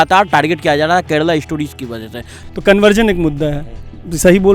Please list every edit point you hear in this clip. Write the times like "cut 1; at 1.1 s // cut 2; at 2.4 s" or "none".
cut 1; at 2.4 s